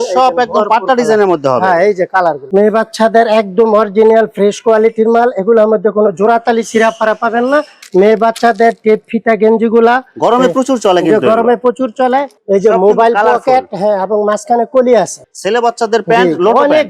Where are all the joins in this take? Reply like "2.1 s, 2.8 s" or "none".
2.4 s, 7.8 s, 12.3 s, 15.2 s